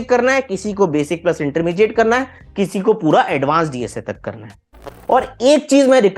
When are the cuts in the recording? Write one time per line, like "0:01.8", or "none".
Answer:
none